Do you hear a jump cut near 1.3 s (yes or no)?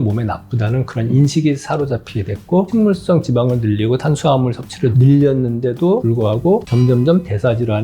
no